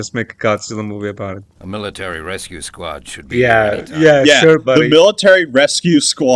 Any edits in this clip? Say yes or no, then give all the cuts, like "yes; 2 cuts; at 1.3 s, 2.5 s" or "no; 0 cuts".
yes; 1 cut; at 1.5 s